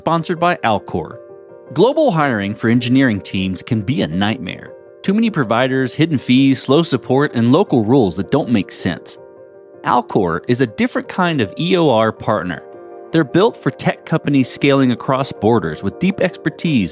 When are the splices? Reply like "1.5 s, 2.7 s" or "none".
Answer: none